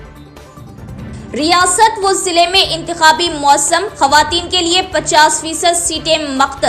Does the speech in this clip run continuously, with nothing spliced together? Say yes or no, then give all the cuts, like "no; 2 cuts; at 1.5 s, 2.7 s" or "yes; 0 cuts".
no; 1 cut; at 1.0 s